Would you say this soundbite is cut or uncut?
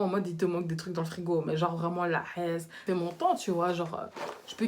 cut